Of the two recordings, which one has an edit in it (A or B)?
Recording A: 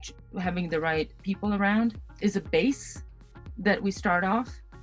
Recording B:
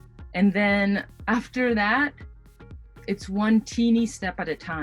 A